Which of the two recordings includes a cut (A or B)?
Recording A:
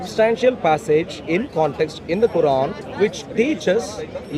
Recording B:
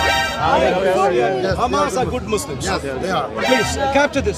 A